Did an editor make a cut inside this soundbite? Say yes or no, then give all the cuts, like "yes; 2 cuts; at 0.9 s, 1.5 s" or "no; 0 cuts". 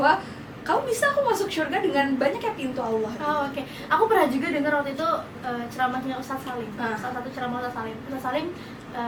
no; 0 cuts